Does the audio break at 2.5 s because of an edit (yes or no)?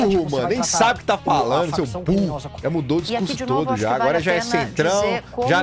yes